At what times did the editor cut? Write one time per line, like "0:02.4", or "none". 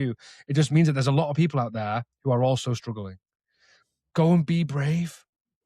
0:04.0